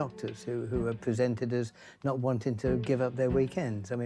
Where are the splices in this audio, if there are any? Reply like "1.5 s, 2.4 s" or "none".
none